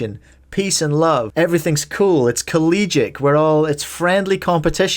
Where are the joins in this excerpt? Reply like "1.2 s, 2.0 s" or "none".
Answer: 1.3 s